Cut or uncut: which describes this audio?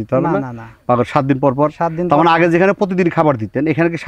uncut